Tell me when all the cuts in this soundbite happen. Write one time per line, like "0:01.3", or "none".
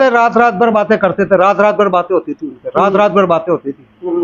none